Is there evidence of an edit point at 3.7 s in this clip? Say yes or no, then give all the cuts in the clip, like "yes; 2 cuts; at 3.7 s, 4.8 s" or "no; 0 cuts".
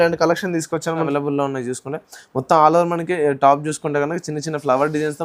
no; 1 cut; at 1.1 s